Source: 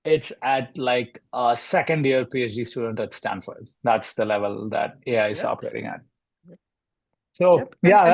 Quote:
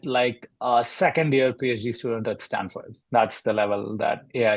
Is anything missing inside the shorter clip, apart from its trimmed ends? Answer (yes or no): no